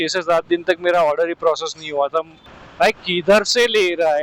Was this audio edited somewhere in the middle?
yes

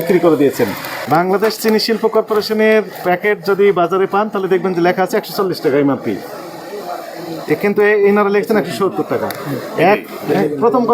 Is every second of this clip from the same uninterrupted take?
no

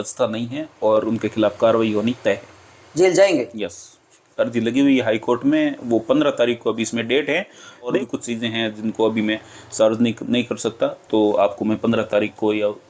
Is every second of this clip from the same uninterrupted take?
no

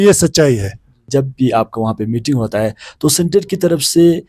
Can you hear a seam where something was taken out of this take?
yes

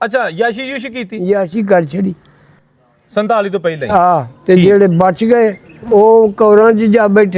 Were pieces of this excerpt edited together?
no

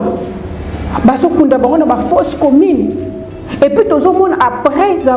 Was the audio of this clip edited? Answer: no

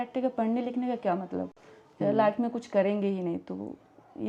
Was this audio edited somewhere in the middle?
no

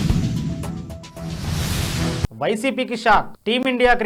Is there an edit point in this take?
no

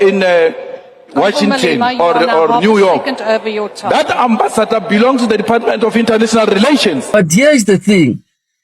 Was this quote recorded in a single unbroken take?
no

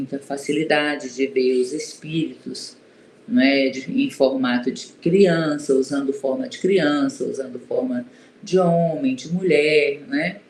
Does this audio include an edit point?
no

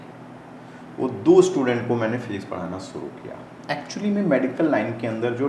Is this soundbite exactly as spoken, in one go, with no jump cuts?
no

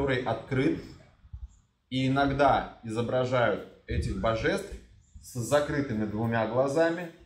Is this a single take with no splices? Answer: yes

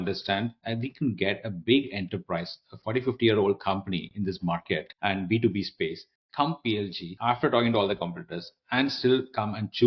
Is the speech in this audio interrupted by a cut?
yes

